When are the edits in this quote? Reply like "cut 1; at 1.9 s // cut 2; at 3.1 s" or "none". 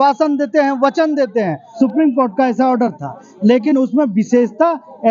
cut 1; at 1.6 s